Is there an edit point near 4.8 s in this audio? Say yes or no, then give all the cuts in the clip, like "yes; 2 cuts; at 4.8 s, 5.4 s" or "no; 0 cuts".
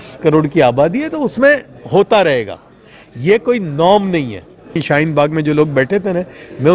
yes; 1 cut; at 4.8 s